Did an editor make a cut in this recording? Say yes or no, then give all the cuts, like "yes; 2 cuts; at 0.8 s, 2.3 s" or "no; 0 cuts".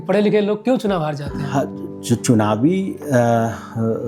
no; 0 cuts